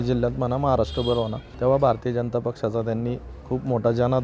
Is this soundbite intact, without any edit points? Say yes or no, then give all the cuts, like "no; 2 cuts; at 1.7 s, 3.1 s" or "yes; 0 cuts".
no; 1 cut; at 1.4 s